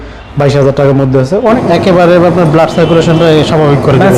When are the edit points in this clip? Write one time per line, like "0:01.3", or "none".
0:01.5

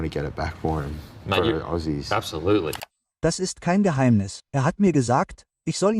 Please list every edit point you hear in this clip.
0:02.8

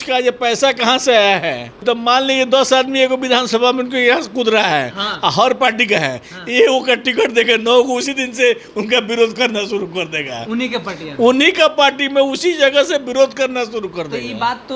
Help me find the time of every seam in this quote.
0:01.8

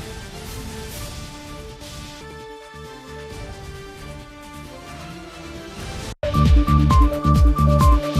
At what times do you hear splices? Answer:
0:06.1

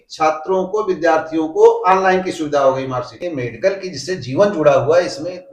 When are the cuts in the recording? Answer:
0:03.1

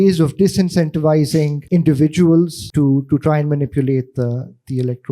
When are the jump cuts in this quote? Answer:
0:01.6
0:02.6

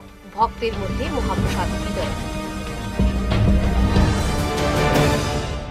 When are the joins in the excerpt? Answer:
none

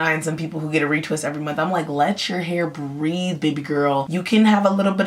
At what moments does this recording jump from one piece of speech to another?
none

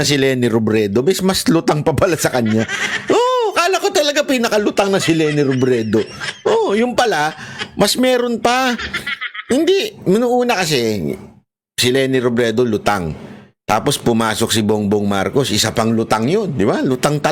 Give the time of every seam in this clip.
none

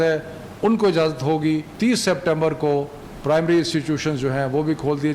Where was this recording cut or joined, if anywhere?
0:01.7

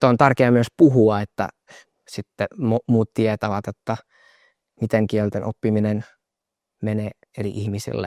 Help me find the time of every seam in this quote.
none

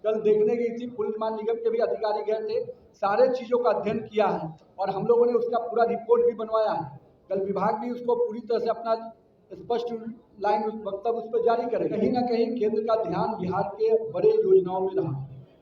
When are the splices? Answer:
0:12.0

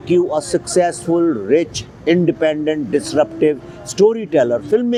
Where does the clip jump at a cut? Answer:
none

